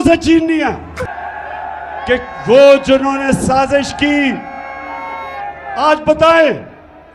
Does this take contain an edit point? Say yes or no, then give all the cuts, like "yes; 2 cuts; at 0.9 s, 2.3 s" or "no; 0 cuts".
yes; 1 cut; at 1.1 s